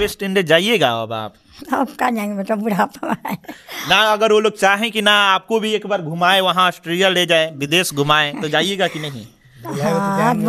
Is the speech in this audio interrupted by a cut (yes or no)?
no